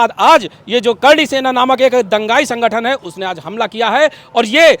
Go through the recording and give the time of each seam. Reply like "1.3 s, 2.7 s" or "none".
none